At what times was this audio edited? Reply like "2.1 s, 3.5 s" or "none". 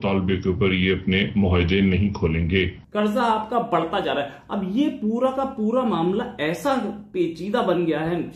2.8 s